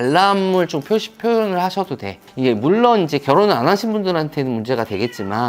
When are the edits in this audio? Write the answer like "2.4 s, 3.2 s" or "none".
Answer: 2.2 s